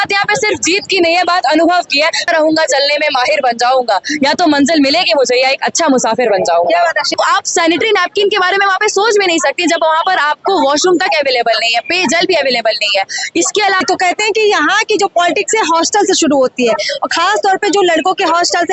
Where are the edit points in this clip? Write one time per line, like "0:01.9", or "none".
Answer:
0:02.2
0:07.1
0:13.8